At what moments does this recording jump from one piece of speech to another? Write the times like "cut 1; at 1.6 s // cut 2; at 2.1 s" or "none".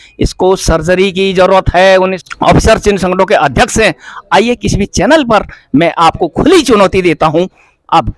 cut 1; at 2.2 s